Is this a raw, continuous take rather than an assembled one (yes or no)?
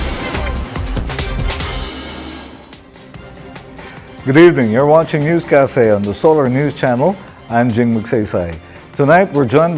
yes